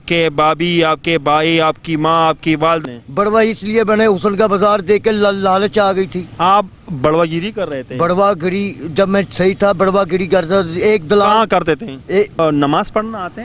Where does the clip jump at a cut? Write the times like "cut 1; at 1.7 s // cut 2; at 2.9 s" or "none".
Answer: cut 1; at 2.8 s // cut 2; at 12.4 s